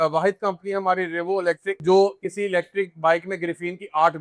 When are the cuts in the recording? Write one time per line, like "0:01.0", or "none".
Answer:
0:01.8